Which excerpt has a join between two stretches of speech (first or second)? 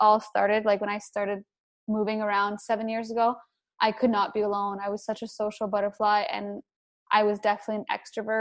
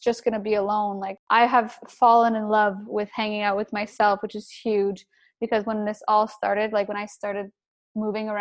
second